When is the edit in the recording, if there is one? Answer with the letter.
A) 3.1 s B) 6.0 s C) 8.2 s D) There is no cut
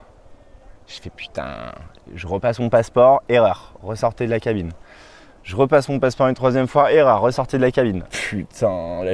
C